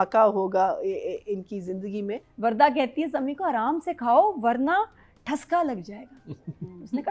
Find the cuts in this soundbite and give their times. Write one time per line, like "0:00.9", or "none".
0:02.2

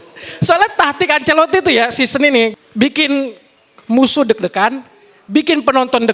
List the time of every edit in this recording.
0:02.5

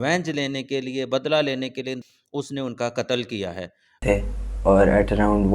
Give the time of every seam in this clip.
0:02.1
0:04.0

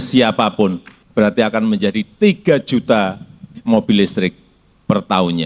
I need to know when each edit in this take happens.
0:00.9

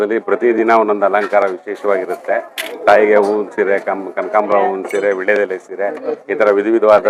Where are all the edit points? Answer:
none

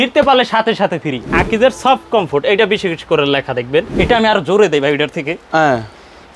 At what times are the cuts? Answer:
0:01.3
0:03.9

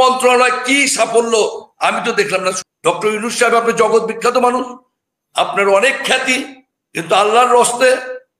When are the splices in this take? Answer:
0:02.7

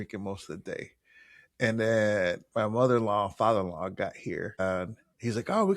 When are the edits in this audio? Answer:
0:04.6

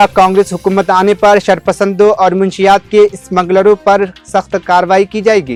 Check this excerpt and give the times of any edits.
none

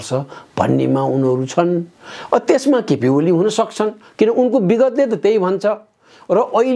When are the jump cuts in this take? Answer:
none

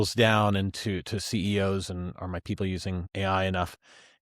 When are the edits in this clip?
0:03.1

